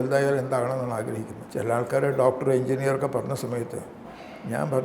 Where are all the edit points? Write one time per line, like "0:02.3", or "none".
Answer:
0:01.4